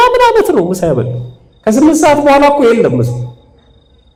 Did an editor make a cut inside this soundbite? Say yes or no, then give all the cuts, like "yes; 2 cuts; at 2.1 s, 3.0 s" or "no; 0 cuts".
no; 0 cuts